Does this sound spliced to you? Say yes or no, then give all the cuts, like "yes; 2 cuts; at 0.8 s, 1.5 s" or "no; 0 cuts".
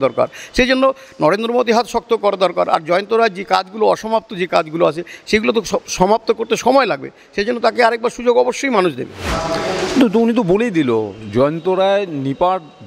no; 0 cuts